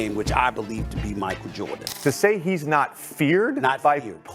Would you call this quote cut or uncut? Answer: cut